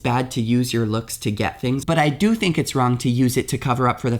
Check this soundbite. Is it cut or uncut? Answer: cut